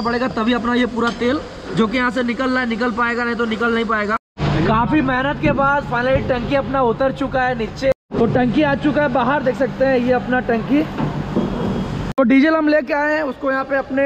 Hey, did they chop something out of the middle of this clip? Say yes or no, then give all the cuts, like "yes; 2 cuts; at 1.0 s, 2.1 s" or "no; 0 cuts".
yes; 3 cuts; at 4.3 s, 7.9 s, 12.1 s